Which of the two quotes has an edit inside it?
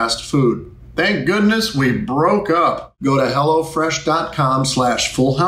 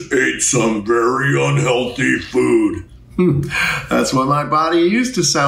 first; 1 cut; at 2.9 s

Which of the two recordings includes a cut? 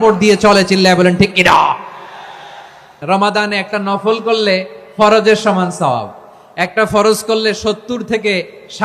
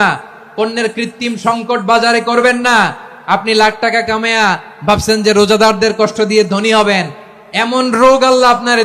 first; 1 cut; at 3.0 s

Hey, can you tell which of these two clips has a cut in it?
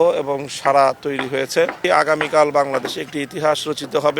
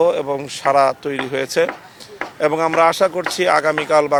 first; 1 cut; at 1.8 s

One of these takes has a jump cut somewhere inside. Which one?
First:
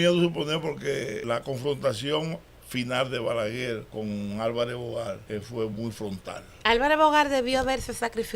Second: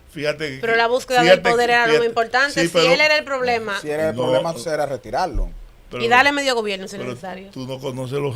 first; 4 cuts; at 1.2 s, 3.9 s, 5.2 s, 6.5 s

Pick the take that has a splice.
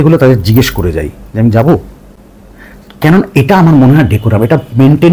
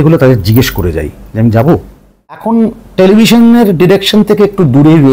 second; 1 cut; at 2.4 s

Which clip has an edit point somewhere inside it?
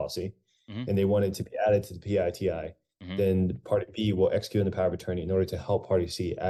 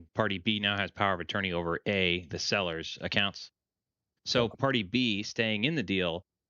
second; 1 cut; at 4.2 s

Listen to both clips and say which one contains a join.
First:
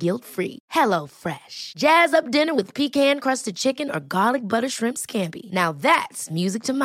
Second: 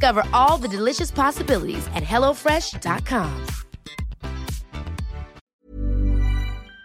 second; 1 cut; at 5.4 s

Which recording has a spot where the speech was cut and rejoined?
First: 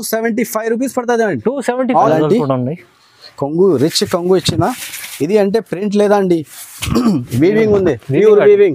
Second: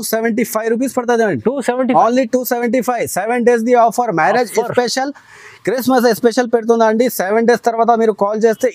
first; 1 cut; at 2.1 s

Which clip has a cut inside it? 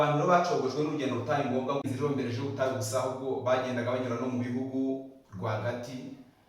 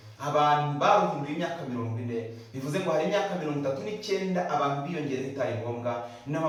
first; 1 cut; at 1.9 s

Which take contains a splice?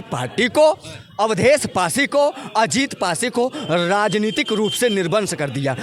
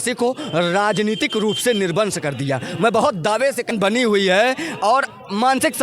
second; 1 cut; at 3.7 s

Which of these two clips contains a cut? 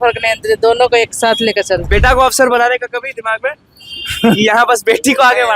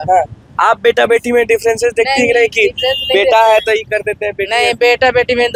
first; 1 cut; at 1.9 s

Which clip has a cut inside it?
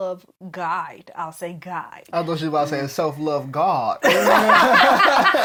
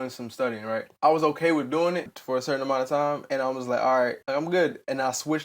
second; 4 cuts; at 0.9 s, 2.2 s, 3.2 s, 4.2 s

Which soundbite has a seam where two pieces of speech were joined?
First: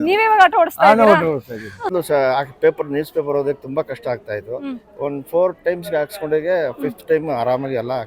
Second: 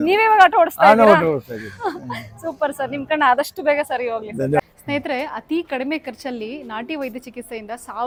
first; 1 cut; at 1.9 s

